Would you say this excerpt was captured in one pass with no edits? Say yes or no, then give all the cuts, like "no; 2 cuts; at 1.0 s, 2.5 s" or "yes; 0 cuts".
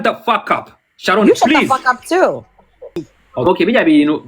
no; 1 cut; at 3.1 s